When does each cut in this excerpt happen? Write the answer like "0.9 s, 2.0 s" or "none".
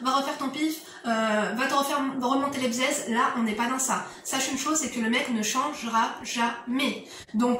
none